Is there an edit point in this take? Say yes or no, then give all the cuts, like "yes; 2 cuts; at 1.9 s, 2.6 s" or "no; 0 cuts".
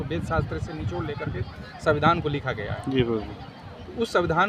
no; 0 cuts